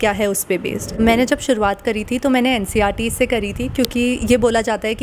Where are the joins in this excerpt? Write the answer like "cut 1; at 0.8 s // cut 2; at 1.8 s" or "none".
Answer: cut 1; at 1.0 s

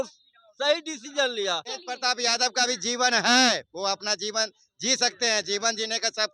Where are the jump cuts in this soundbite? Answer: cut 1; at 1.8 s

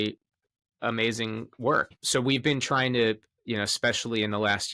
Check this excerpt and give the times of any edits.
cut 1; at 1.9 s

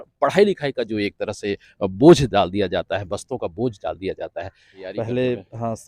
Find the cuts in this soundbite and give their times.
cut 1; at 4.8 s

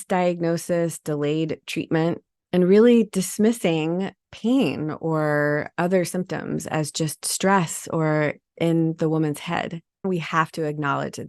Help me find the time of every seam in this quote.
cut 1; at 10.1 s

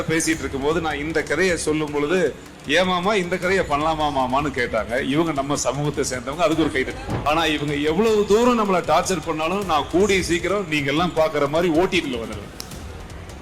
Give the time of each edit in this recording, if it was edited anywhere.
cut 1; at 7.1 s

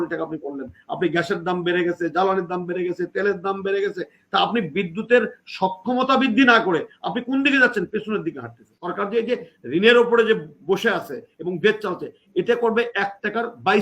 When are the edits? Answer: cut 1; at 8.8 s

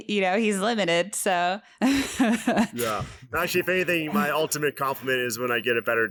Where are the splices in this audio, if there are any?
none

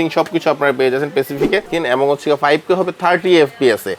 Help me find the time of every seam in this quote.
cut 1; at 1.7 s

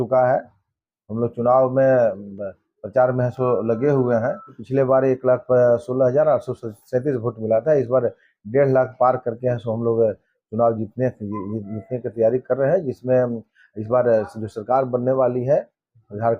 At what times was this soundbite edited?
cut 1; at 4.6 s

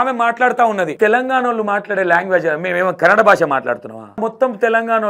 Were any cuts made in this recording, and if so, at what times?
cut 1; at 0.9 s // cut 2; at 4.2 s

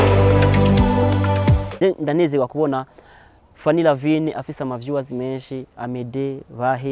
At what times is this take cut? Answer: cut 1; at 1.2 s

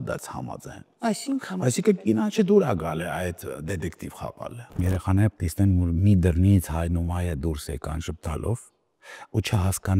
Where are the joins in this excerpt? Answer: cut 1; at 4.8 s

